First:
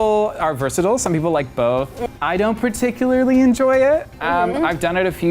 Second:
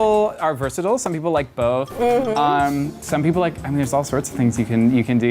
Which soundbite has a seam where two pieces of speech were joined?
first; 1 cut; at 1.9 s

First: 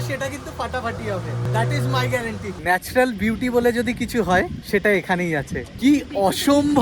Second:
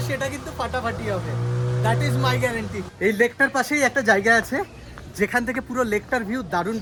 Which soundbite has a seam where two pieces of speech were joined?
first; 4 cuts; at 1.5 s, 2.5 s, 4.6 s, 5.6 s

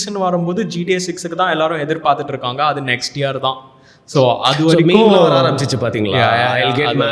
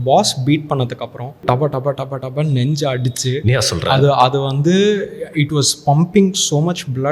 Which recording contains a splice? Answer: second; 1 cut; at 1.4 s

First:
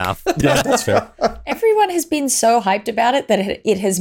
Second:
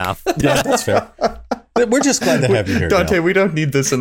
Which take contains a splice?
first; 1 cut; at 1.6 s

